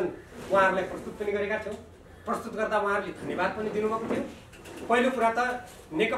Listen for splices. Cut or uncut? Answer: uncut